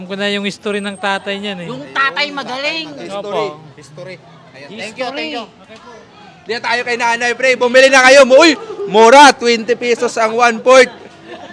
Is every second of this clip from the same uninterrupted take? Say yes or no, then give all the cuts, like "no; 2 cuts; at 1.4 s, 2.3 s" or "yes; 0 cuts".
yes; 0 cuts